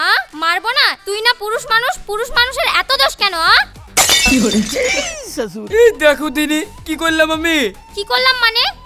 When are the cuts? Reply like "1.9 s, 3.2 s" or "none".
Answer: none